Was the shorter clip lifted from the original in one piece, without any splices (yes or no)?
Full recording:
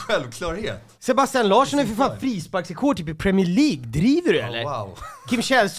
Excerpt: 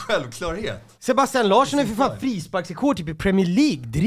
yes